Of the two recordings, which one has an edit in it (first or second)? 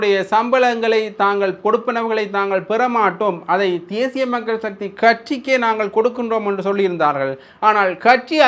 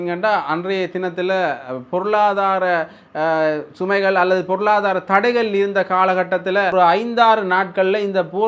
second